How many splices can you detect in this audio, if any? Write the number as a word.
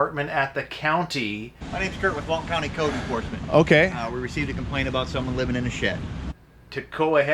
two